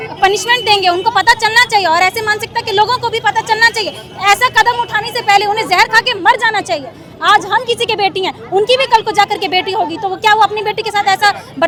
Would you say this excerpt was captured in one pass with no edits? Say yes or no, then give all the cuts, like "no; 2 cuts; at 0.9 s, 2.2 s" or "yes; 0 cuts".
yes; 0 cuts